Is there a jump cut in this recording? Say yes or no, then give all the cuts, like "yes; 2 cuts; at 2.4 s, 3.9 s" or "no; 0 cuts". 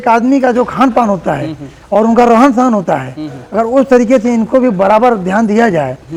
no; 0 cuts